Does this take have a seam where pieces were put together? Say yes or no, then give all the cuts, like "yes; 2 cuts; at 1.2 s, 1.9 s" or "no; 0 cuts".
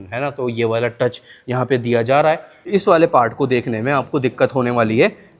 yes; 1 cut; at 2.5 s